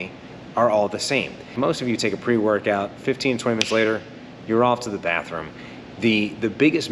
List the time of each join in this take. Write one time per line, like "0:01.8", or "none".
0:01.5